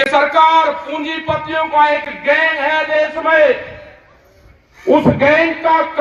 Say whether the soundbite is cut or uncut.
uncut